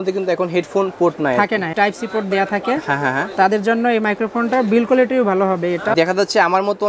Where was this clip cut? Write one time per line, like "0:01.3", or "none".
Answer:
0:01.7
0:06.0